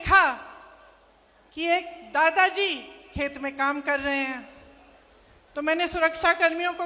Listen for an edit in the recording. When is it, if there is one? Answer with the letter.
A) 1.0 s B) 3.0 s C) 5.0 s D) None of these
D